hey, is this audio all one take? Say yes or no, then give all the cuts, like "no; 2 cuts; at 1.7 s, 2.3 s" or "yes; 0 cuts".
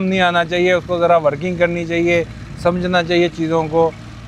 yes; 0 cuts